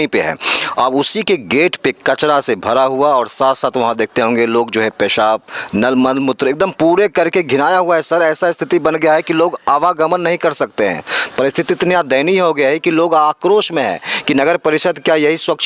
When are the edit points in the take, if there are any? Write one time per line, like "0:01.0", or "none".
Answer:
none